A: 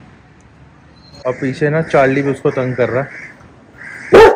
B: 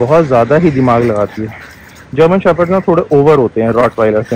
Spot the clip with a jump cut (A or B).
A